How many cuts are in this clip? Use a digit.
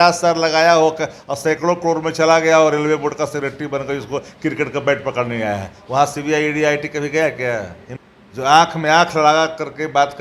1